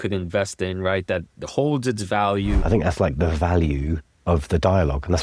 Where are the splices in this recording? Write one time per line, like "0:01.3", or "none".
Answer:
0:02.6
0:04.1